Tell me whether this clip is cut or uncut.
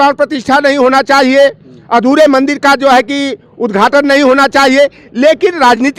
uncut